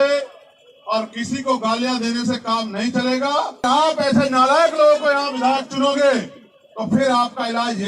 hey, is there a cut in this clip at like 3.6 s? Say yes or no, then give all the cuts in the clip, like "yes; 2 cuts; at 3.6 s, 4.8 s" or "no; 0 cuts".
yes; 1 cut; at 3.6 s